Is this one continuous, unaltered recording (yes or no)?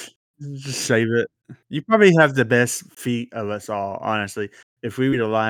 yes